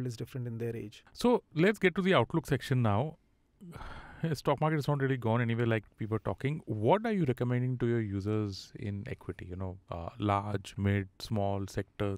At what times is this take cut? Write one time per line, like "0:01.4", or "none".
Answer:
0:01.0